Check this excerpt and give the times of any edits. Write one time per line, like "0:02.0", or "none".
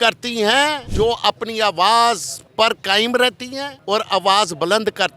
0:00.8
0:02.4
0:03.7

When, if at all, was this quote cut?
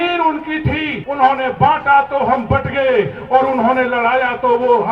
0:01.0

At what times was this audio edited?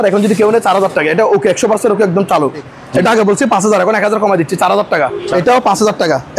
0:02.7
0:05.2

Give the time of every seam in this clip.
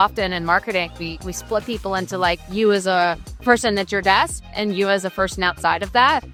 none

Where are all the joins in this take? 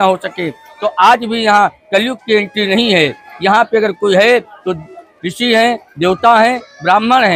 none

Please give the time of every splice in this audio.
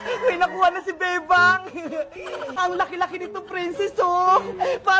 none

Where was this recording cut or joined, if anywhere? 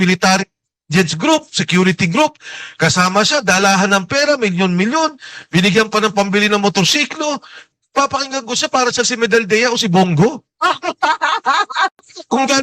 0:07.8

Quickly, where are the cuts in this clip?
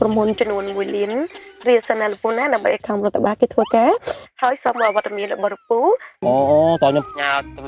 0:06.2

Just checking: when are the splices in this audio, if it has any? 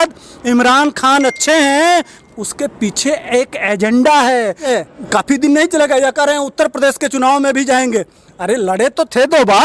0:02.2
0:04.7

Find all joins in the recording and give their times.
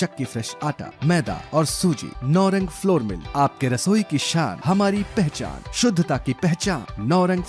none

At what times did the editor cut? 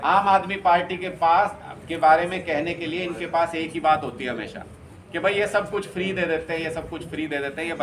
none

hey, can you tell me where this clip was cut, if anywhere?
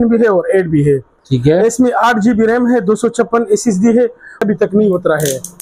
0:04.4

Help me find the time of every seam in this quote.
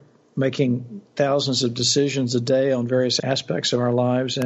0:03.1

